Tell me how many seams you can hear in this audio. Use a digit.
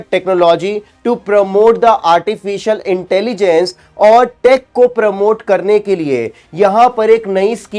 0